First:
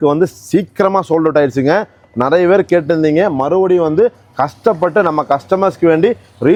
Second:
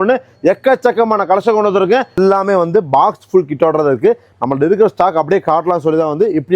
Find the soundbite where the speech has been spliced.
second; 1 cut; at 2.2 s

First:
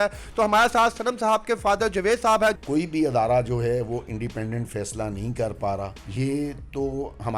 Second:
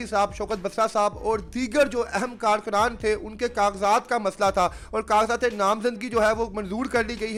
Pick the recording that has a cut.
first; 2 cuts; at 2.6 s, 6.0 s

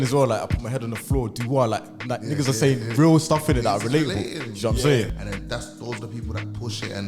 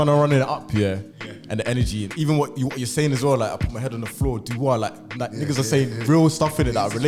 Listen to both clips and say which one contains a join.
first; 1 cut; at 5.1 s

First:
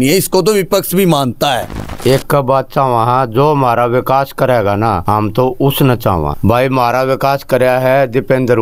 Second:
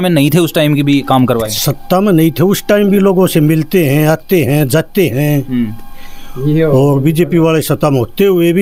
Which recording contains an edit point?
first; 3 cuts; at 1.9 s, 5.0 s, 6.3 s

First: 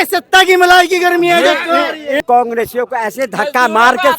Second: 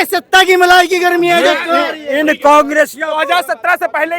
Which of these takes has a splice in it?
first; 1 cut; at 2.2 s

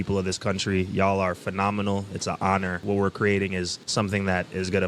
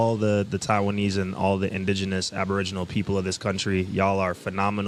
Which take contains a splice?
first; 2 cuts; at 2.8 s, 3.8 s

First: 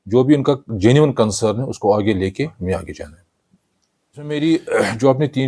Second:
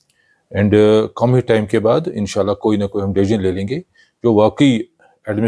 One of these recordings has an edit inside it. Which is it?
first; 1 cut; at 4.3 s

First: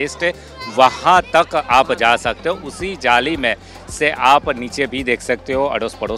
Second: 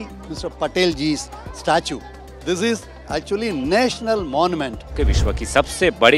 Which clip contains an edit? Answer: second; 1 cut; at 4.9 s

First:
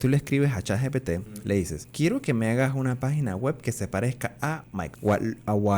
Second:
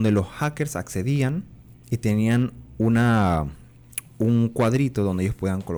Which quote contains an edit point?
first; 2 cuts; at 1.6 s, 4.7 s

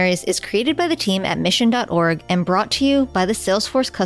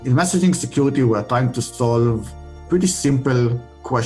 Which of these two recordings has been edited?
second; 1 cut; at 2.6 s

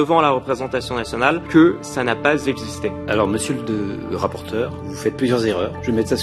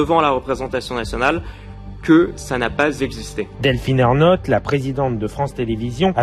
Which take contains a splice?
first; 2 cuts; at 1.4 s, 3.0 s

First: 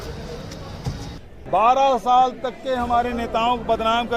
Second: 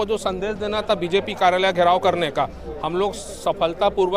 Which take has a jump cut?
first; 1 cut; at 1.3 s

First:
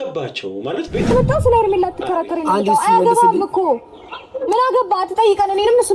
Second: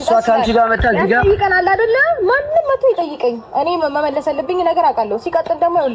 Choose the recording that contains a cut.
first; 1 cut; at 1.1 s

